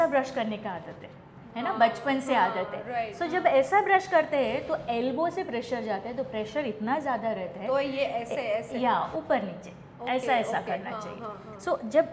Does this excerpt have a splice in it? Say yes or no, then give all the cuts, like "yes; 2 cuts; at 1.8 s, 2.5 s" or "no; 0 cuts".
no; 0 cuts